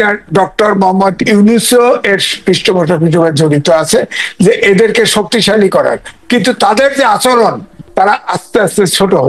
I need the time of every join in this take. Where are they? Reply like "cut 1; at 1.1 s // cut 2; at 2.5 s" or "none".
none